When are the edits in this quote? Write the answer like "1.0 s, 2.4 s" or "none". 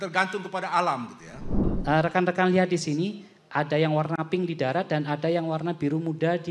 1.7 s

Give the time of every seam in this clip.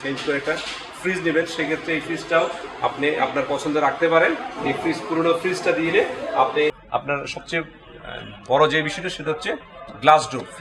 6.8 s

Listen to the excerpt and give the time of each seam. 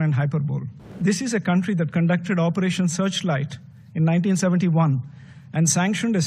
0.9 s

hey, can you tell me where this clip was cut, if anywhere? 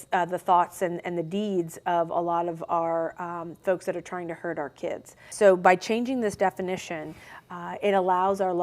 5.3 s

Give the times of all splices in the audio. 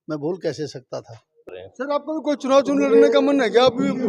1.4 s

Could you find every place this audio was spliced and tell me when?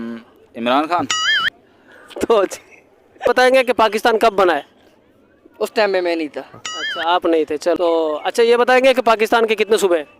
3.3 s, 7.8 s

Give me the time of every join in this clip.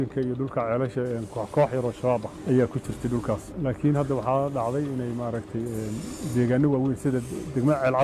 3.5 s

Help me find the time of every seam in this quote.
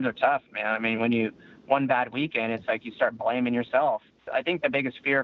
4.2 s

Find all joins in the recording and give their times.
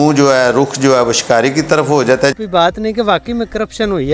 2.4 s

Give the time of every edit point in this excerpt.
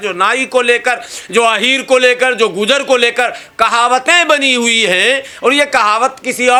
none

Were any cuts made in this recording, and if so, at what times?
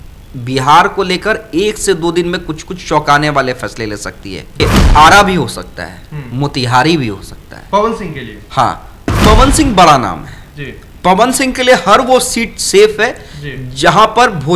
4.6 s, 9.2 s

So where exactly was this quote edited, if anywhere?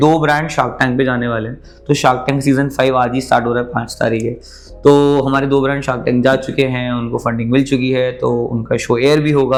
none

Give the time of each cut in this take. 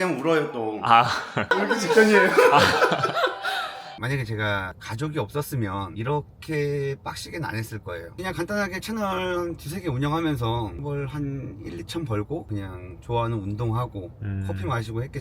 1.5 s, 3.9 s, 8.1 s, 10.8 s

